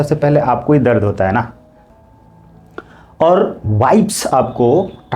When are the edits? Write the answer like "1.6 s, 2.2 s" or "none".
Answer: 1.8 s